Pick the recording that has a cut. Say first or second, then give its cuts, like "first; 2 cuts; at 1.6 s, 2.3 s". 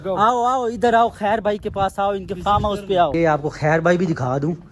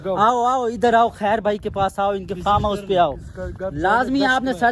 first; 1 cut; at 3.1 s